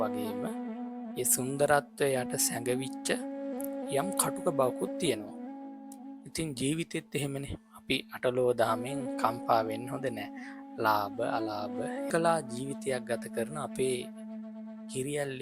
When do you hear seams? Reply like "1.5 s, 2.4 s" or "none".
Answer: 12.1 s